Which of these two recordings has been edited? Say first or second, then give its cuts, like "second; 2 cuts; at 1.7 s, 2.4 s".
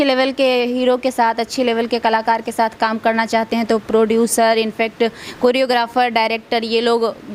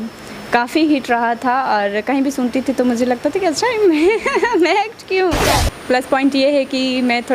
second; 1 cut; at 5.5 s